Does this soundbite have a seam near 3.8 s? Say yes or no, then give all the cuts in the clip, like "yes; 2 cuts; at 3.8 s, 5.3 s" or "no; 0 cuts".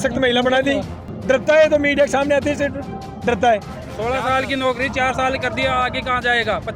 yes; 2 cuts; at 1.1 s, 3.8 s